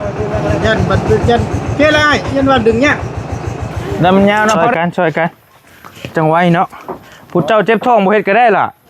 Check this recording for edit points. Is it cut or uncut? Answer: cut